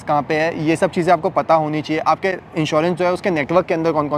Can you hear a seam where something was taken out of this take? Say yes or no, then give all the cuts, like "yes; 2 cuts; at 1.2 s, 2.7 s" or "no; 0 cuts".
no; 0 cuts